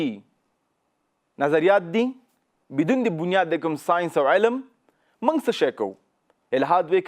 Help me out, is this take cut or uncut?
uncut